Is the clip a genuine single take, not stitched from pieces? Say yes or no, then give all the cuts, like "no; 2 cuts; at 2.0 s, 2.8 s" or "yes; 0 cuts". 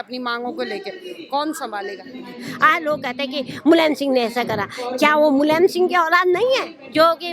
no; 1 cut; at 2.2 s